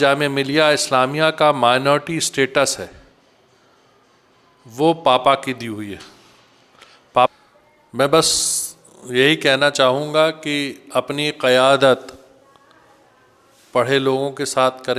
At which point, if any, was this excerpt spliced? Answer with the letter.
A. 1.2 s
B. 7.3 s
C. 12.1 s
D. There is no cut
B